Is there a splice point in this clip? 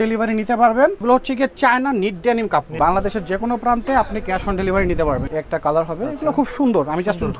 yes; 3 cuts; at 1.0 s, 2.7 s, 5.3 s

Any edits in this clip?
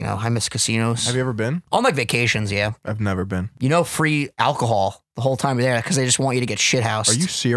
yes; 2 cuts; at 1.6 s, 3.5 s

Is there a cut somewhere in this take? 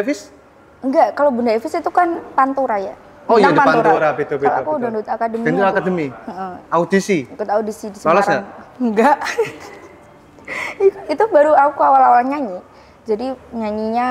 no; 0 cuts

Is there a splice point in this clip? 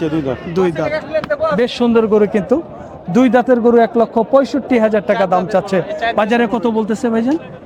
no; 0 cuts

